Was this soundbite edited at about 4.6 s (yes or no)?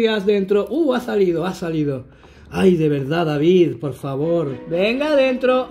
yes